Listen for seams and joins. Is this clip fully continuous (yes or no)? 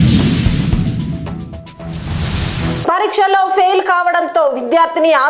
yes